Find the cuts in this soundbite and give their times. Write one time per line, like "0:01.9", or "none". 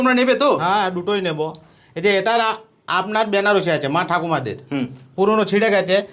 none

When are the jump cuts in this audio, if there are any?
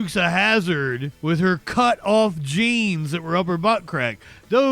0:01.1

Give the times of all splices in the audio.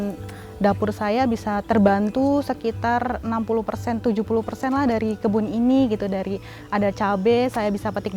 0:01.6

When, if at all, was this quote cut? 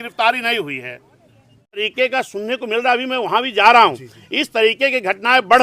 0:01.9

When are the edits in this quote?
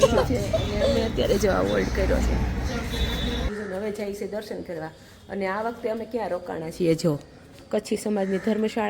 0:03.5

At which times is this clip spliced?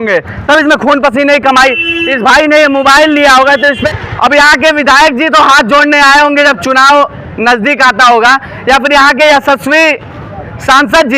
0:03.8

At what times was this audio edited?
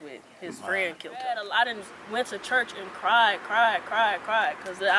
0:01.5

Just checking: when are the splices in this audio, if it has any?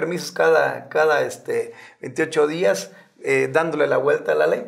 none

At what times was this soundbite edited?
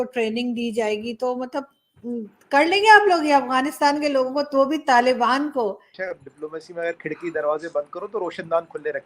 0:05.9

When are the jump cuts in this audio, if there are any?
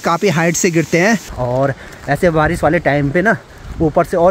0:01.3

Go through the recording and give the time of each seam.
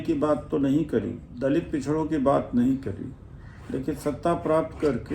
0:01.3

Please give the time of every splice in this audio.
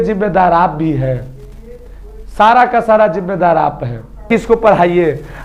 0:04.3

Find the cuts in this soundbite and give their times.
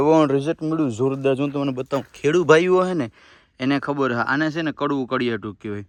none

